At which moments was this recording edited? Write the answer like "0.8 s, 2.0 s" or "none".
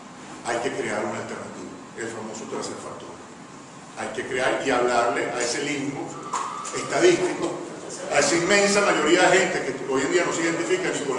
none